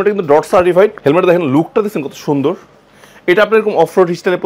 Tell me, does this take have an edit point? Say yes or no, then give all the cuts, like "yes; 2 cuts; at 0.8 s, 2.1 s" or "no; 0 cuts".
yes; 1 cut; at 1.0 s